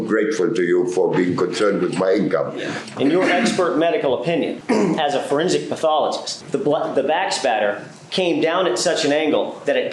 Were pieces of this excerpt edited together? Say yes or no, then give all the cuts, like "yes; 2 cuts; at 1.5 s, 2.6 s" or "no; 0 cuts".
yes; 3 cuts; at 2.8 s, 4.6 s, 6.3 s